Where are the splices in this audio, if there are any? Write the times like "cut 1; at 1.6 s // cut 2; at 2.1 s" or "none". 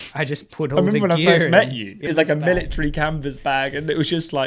cut 1; at 2.1 s